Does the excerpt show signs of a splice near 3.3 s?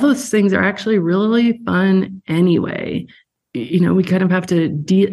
yes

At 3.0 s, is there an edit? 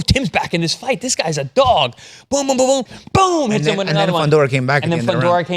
yes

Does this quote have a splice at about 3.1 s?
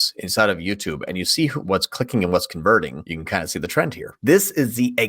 yes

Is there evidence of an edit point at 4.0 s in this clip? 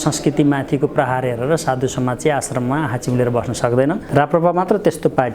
yes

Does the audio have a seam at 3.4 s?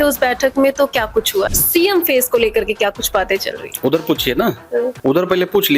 no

